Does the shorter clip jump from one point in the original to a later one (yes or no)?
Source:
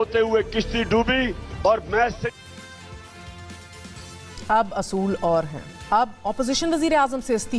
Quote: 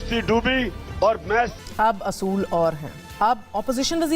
yes